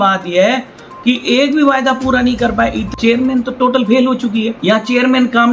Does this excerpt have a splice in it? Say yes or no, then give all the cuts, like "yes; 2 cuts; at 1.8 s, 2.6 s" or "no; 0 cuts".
yes; 2 cuts; at 2.9 s, 4.5 s